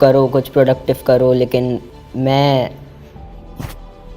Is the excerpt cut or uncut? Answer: cut